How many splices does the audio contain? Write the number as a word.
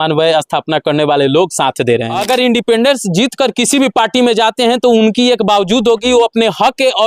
one